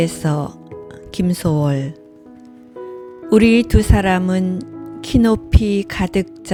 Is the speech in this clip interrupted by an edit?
no; 0 cuts

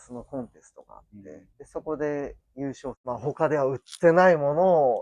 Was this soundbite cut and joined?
yes; 2 cuts; at 1.5 s, 3.0 s

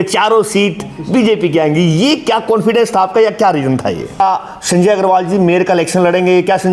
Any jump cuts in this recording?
yes; 1 cut; at 4.2 s

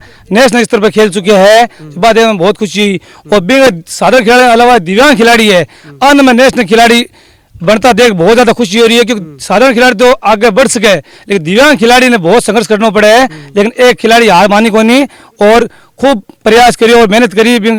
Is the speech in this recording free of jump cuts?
yes; 0 cuts

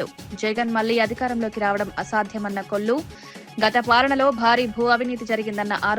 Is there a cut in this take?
no; 0 cuts

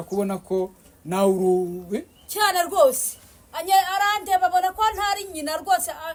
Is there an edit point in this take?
no; 0 cuts

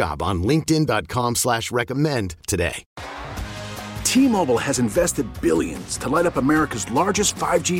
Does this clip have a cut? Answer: yes; 1 cut; at 2.8 s

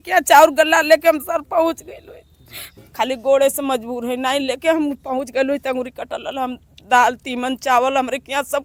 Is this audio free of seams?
yes; 0 cuts

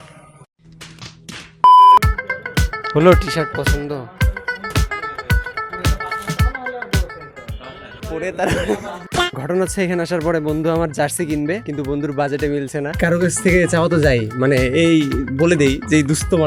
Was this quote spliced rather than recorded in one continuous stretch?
no; 0 cuts

